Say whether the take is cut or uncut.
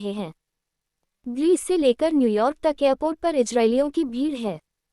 cut